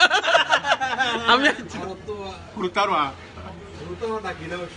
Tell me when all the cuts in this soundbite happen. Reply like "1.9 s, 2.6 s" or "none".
1.6 s